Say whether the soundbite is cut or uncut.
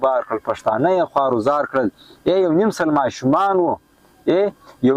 uncut